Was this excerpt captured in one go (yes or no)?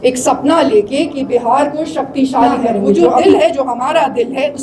no